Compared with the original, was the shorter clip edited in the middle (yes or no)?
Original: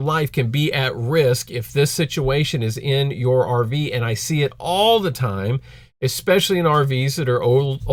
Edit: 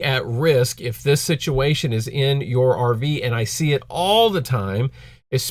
no